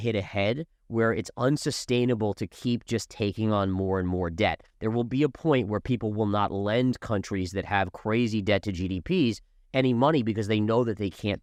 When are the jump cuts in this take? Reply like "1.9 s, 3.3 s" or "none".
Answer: none